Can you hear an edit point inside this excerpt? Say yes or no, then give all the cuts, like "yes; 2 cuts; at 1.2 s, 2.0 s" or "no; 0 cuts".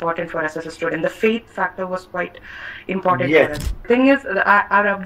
yes; 1 cut; at 3.8 s